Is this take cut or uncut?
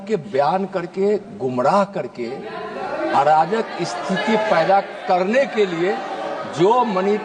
uncut